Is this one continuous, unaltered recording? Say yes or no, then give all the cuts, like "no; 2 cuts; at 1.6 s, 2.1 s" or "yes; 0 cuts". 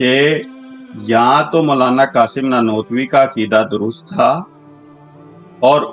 yes; 0 cuts